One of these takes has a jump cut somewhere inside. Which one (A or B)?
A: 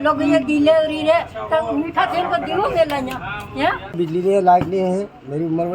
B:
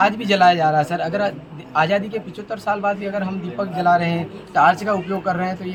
A